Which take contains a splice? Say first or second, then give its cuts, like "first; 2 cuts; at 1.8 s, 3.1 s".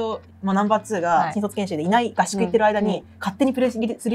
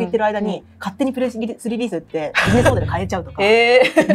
first; 1 cut; at 1.3 s